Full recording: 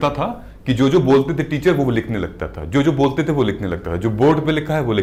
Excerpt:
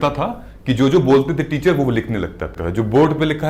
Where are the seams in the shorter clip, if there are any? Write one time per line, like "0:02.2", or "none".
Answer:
0:02.5